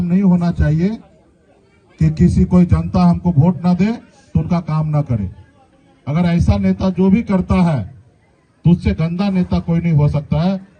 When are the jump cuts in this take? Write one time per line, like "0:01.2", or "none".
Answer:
none